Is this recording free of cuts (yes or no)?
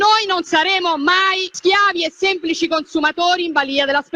no